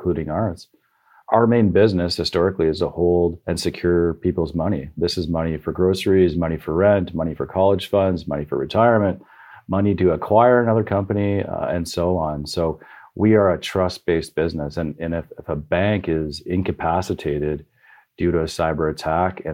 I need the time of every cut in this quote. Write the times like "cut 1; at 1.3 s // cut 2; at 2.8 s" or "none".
cut 1; at 1.3 s // cut 2; at 3.5 s